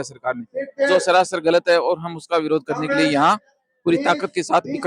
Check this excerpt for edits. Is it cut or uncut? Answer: uncut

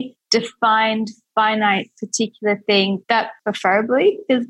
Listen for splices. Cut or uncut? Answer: uncut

